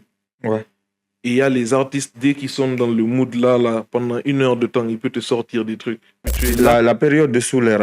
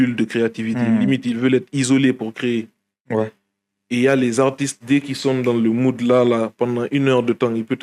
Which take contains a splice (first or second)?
first